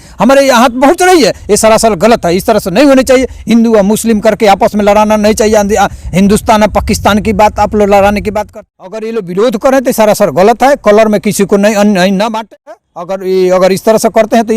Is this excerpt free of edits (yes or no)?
no